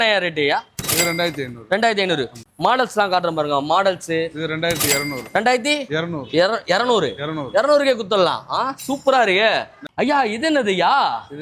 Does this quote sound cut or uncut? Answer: cut